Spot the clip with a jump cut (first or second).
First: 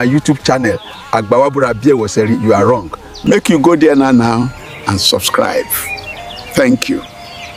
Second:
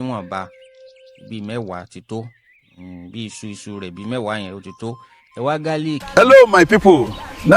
second